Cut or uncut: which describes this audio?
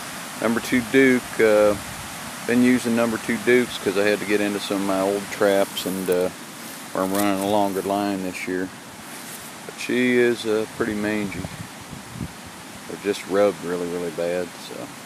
cut